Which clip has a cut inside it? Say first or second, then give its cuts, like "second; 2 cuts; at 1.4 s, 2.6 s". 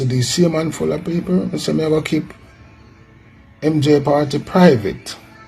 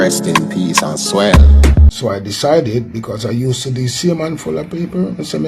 second; 1 cut; at 1.9 s